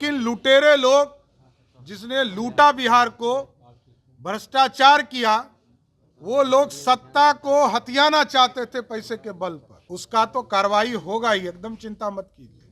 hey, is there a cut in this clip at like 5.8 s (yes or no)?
no